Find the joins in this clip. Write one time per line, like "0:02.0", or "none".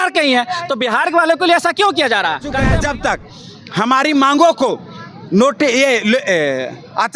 0:02.6